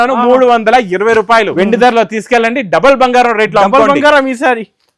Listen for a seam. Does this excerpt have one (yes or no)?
yes